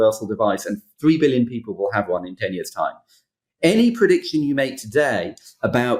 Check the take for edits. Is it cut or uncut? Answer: uncut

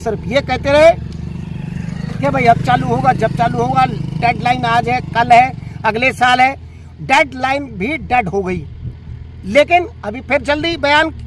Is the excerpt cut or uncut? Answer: uncut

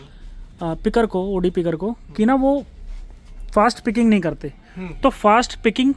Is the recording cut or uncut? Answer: uncut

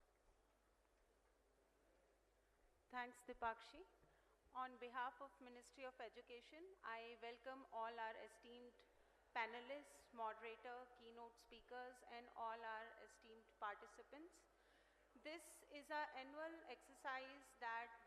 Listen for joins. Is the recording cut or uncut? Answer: cut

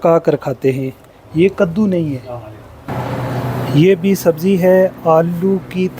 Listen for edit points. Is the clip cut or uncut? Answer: cut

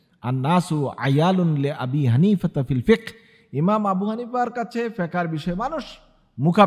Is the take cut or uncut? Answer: uncut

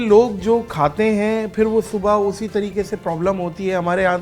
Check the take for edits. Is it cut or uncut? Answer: uncut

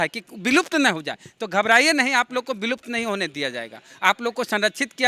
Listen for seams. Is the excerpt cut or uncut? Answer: uncut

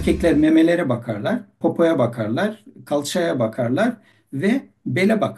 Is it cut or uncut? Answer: cut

